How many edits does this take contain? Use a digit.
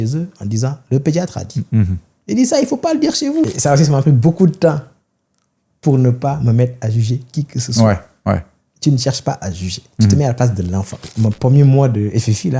2